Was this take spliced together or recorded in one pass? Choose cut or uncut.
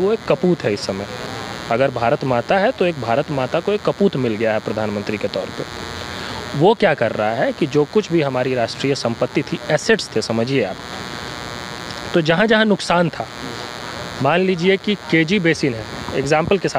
uncut